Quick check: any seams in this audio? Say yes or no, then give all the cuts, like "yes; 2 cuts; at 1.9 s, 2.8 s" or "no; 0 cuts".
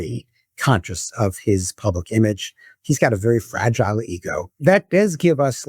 yes; 1 cut; at 4.6 s